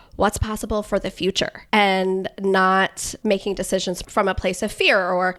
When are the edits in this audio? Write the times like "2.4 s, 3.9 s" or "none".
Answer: 1.6 s, 3.1 s, 4.0 s